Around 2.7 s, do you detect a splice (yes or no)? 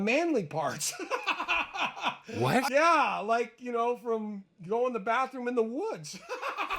yes